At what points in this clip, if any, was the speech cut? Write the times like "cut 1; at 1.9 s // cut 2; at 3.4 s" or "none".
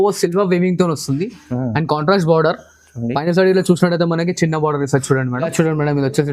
cut 1; at 5.4 s